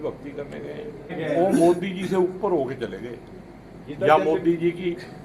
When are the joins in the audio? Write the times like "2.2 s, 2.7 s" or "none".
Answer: 1.2 s